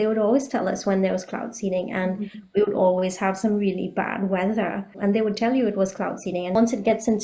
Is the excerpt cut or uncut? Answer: cut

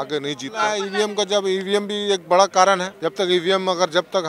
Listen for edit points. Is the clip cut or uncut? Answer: cut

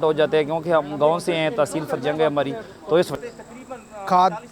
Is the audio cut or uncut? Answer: cut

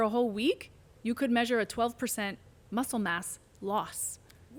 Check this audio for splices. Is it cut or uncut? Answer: uncut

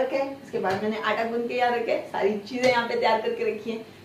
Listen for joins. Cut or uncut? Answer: uncut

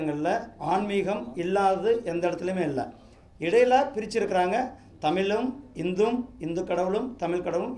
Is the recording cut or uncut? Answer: uncut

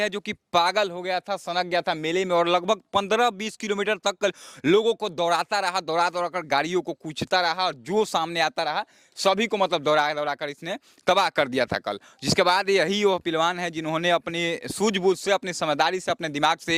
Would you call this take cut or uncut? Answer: uncut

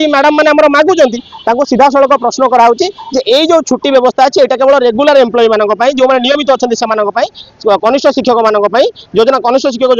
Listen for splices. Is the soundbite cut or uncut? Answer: uncut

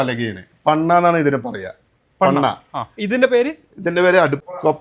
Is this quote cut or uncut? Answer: uncut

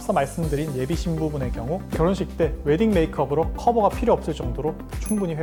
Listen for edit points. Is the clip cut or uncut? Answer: uncut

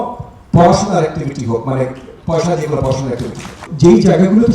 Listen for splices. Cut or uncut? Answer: cut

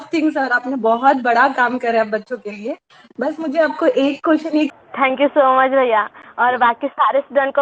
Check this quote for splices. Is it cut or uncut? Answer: cut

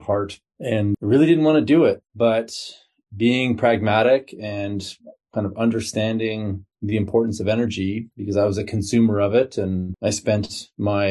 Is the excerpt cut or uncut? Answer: cut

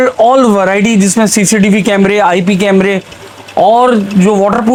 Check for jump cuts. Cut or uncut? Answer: uncut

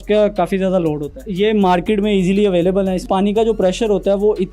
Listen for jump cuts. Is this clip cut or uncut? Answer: cut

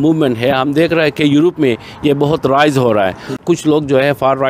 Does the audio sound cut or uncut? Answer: cut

